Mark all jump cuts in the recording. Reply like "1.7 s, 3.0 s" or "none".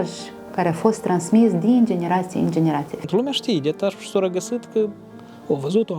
2.9 s